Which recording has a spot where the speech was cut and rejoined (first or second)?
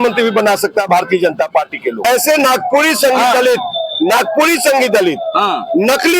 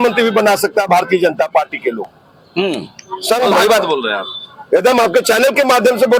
first